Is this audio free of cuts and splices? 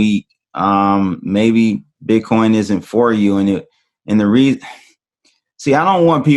no; 1 cut; at 1.9 s

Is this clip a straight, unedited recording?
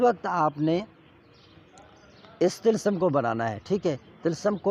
yes; 0 cuts

